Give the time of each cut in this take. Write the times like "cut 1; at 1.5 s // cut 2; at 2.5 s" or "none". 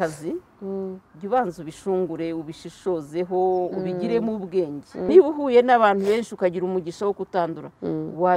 cut 1; at 5.1 s